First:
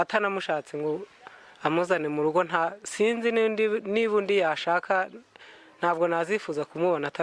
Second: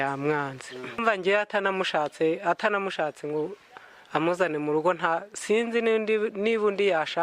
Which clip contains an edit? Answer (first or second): second